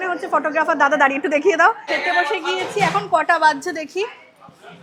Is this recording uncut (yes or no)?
no